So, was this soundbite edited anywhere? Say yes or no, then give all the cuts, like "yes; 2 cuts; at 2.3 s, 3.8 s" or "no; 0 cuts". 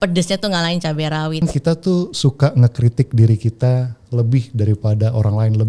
yes; 1 cut; at 1.4 s